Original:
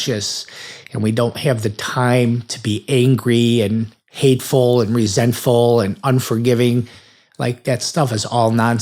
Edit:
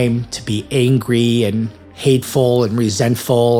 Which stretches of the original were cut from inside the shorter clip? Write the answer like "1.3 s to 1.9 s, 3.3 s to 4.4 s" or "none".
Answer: none